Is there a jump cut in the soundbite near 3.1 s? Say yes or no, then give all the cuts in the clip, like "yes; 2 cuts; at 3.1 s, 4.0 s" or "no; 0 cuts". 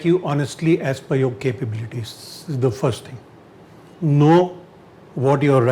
no; 0 cuts